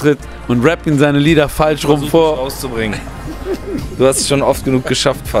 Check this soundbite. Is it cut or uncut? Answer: uncut